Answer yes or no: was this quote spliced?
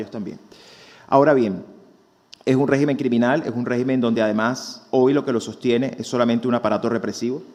no